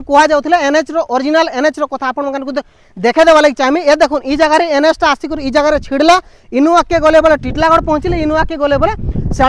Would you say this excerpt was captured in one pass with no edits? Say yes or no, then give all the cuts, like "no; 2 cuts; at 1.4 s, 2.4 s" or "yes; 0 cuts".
yes; 0 cuts